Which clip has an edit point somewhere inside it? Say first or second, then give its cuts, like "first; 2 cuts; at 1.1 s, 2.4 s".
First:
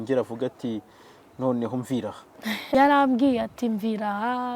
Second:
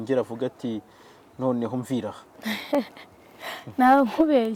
first; 1 cut; at 2.7 s